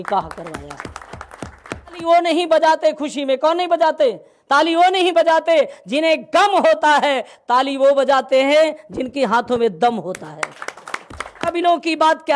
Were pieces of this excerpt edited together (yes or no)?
yes